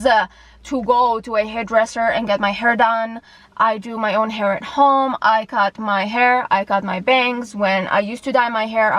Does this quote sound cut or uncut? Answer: uncut